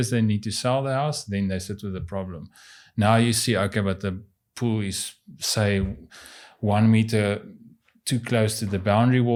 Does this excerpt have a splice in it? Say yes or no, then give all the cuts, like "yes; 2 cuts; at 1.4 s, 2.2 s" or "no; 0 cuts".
no; 0 cuts